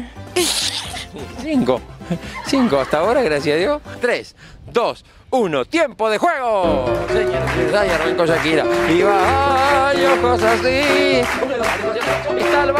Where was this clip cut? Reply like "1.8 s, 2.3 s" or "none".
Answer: none